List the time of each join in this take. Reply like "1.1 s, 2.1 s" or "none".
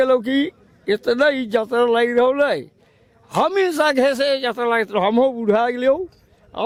none